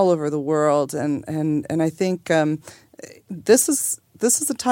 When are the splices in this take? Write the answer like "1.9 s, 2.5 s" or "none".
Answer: none